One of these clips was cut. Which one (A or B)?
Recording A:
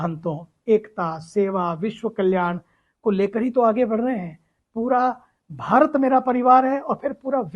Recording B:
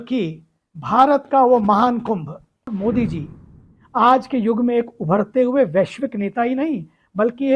B